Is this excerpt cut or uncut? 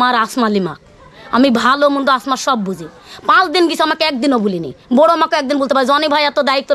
uncut